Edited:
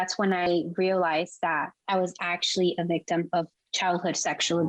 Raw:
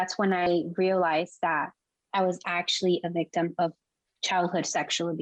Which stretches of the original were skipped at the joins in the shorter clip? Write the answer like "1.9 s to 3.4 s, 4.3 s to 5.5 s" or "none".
1.8 s to 2.0 s, 3.9 s to 4.1 s